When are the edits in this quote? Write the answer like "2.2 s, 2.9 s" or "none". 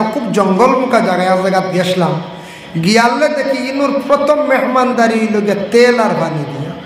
none